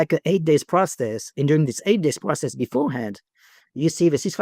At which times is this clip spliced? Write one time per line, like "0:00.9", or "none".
none